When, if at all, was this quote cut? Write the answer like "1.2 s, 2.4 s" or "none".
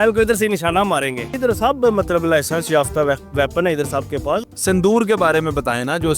1.3 s, 4.4 s